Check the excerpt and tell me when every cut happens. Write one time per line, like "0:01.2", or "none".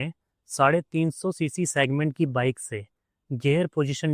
none